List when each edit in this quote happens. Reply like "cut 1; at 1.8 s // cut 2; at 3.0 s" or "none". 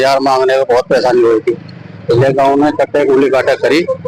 none